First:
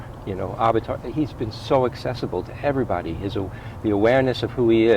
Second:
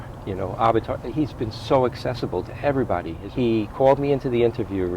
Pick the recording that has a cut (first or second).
second